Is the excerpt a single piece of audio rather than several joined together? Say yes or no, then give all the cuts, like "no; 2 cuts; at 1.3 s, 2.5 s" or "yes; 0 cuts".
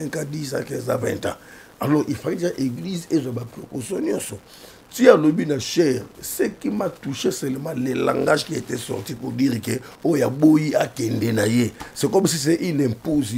yes; 0 cuts